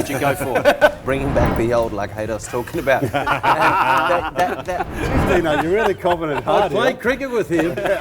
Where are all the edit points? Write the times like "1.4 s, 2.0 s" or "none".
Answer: 1.0 s, 4.9 s